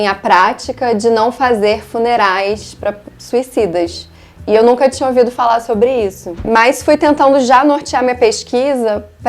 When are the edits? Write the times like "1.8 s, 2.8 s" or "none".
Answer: 6.4 s